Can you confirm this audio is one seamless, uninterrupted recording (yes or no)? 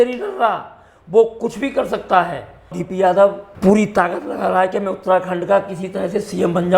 no